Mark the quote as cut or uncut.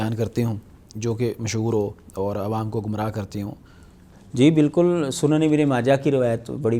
uncut